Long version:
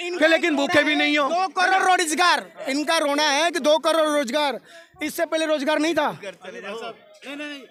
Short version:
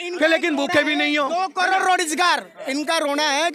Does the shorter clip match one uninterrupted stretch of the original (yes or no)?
yes